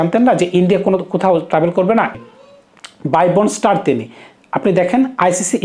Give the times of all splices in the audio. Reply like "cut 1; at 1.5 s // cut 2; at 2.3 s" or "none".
cut 1; at 2.1 s